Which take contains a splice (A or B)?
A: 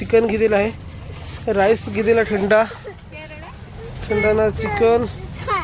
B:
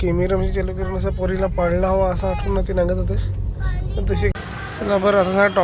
B